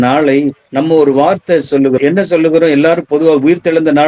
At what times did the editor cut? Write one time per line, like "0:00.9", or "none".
0:02.0